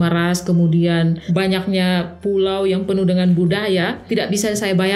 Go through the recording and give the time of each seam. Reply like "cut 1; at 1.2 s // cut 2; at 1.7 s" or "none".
cut 1; at 1.2 s // cut 2; at 4.0 s